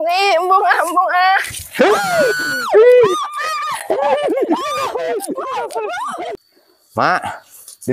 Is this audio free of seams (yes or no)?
no